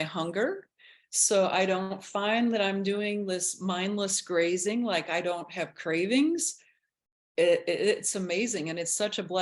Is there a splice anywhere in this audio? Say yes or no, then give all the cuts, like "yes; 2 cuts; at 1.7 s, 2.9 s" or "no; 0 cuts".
no; 0 cuts